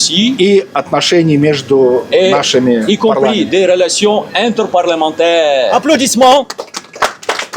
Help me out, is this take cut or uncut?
cut